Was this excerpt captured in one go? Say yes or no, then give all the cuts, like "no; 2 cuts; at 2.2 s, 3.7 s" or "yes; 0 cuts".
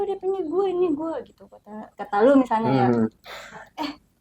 yes; 0 cuts